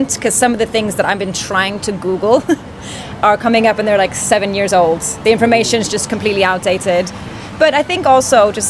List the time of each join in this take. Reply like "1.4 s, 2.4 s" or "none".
none